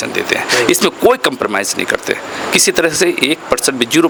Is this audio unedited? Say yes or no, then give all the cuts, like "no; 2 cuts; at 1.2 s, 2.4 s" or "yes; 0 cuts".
yes; 0 cuts